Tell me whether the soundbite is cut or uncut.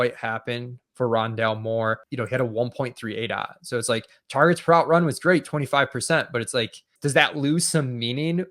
cut